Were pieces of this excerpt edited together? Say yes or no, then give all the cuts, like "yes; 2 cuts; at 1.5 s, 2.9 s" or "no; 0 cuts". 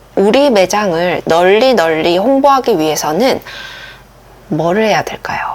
no; 0 cuts